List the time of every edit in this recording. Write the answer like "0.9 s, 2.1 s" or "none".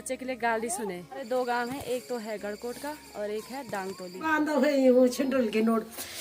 1.3 s, 4.2 s